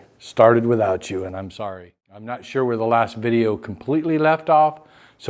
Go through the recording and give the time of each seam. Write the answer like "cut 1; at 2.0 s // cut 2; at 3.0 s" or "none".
cut 1; at 2.4 s